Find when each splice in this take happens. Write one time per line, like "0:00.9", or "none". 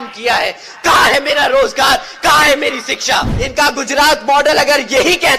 0:03.4